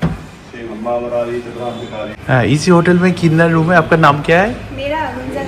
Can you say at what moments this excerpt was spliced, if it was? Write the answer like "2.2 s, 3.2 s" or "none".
2.2 s